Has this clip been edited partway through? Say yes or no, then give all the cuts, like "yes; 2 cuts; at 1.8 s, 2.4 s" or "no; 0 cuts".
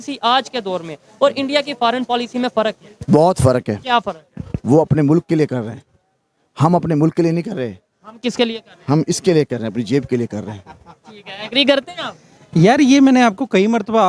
no; 0 cuts